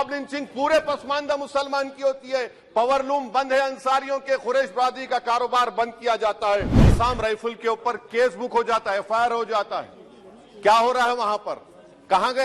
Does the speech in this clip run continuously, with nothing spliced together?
no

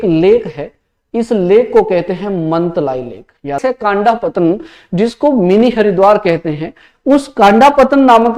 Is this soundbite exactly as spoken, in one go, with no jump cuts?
no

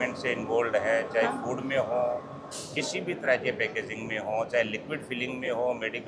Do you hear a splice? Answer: no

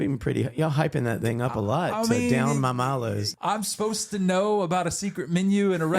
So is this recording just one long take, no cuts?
no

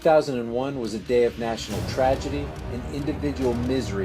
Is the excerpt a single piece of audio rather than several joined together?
no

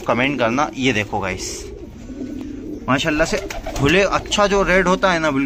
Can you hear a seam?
no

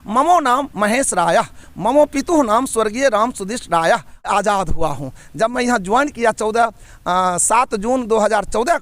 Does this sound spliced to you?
yes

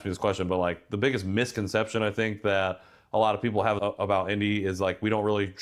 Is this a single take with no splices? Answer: no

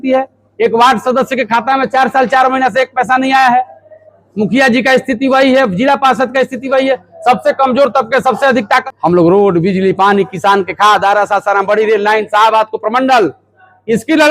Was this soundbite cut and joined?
yes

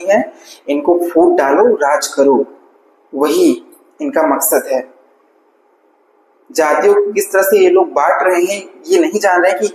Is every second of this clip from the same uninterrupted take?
yes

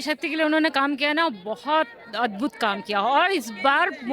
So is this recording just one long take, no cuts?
yes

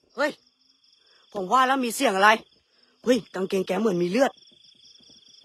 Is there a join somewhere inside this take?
no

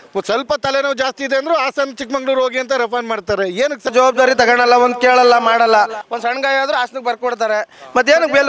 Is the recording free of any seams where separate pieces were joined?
no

